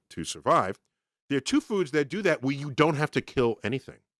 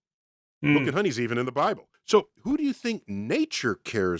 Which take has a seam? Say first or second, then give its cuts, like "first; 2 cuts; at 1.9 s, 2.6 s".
second; 1 cut; at 1.9 s